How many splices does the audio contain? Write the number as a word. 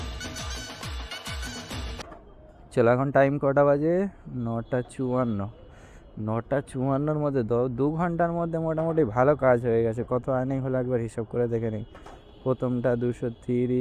one